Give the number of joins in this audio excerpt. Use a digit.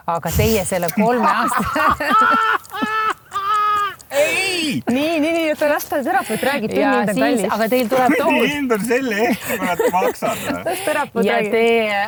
0